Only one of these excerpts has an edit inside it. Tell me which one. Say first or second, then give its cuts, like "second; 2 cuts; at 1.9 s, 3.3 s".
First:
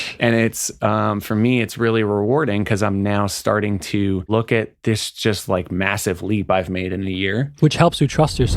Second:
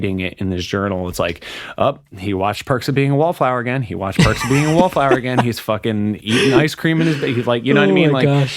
first; 2 cuts; at 4.3 s, 7.5 s